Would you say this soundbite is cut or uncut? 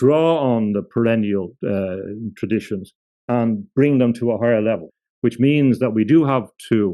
cut